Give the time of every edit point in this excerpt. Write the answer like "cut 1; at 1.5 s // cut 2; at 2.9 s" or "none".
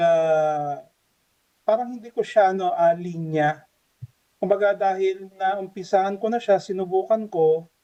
none